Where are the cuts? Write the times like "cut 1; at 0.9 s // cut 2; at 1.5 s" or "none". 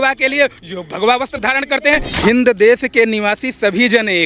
cut 1; at 2.1 s